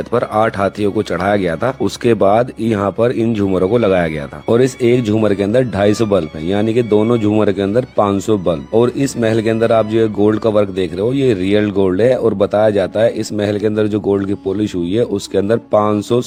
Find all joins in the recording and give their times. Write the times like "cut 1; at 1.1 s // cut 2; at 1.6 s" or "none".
none